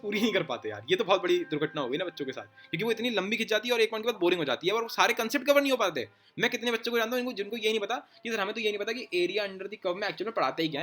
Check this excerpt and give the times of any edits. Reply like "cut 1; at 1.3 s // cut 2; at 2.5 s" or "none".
none

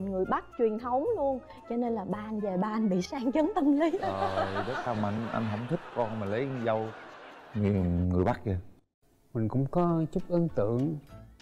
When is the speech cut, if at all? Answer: none

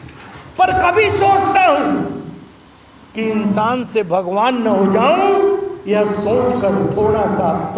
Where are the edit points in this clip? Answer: none

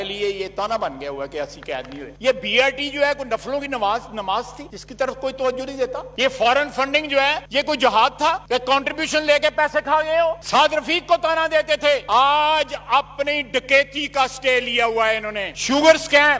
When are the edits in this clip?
cut 1; at 2.1 s // cut 2; at 10.4 s // cut 3; at 15.5 s

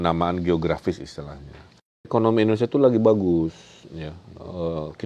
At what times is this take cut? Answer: cut 1; at 2.0 s

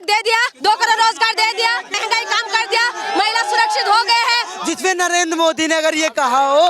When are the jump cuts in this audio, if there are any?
cut 1; at 1.9 s // cut 2; at 4.5 s

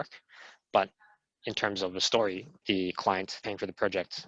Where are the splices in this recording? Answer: cut 1; at 2.5 s // cut 2; at 3.3 s

